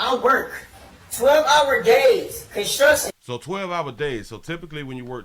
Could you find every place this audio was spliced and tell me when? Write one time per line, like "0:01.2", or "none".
none